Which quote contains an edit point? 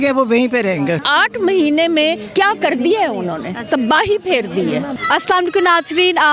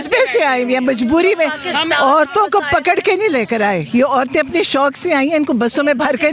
first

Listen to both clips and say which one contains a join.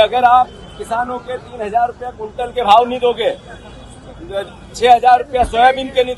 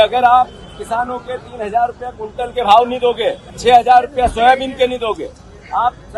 second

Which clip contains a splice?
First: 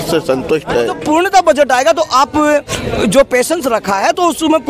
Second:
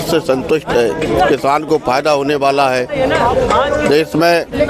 first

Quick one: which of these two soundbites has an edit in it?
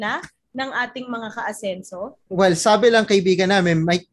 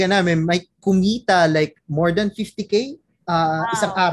first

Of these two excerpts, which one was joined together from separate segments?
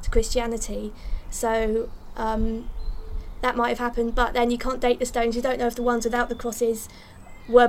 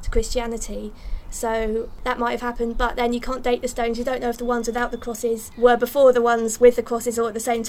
second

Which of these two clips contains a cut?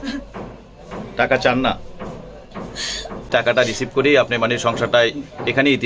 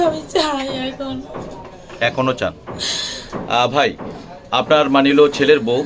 first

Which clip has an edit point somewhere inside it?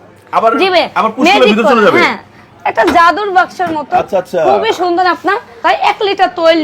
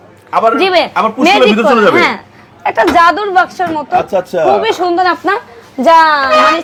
first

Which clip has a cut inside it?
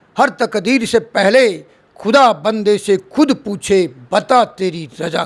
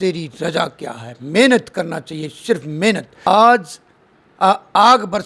second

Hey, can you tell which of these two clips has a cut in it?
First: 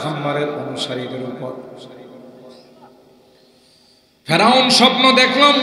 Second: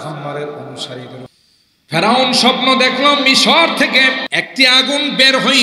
second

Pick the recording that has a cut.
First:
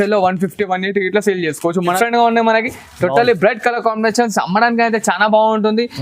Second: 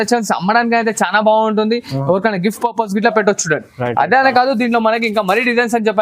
first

